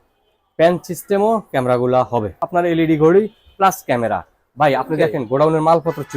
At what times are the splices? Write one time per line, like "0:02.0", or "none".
0:02.4